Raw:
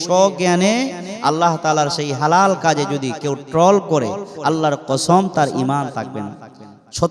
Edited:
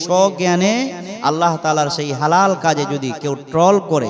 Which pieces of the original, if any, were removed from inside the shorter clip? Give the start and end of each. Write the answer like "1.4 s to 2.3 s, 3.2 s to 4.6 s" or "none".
none